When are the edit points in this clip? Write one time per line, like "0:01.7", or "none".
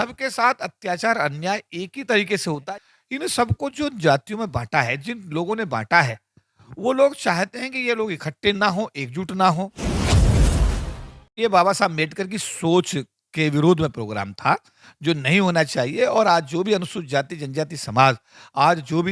0:02.6
0:09.7
0:11.3